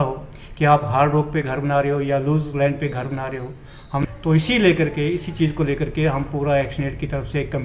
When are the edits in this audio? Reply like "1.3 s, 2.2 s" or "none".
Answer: 4.0 s